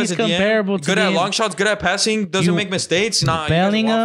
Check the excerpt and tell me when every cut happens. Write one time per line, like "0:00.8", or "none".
none